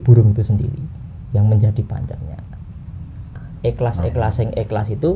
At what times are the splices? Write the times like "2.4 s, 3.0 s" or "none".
3.4 s